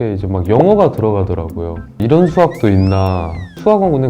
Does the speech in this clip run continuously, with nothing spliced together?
no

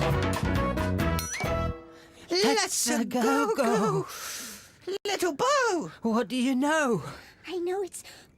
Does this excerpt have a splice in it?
yes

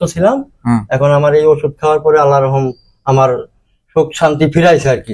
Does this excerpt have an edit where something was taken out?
no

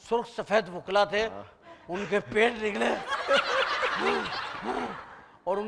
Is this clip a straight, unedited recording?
yes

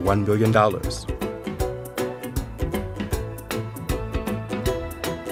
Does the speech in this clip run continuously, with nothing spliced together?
yes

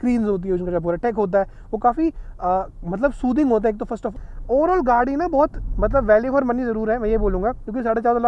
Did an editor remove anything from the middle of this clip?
yes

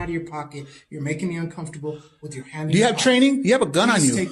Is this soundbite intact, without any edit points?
yes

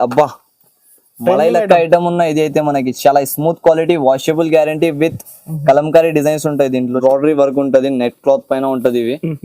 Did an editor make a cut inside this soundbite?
yes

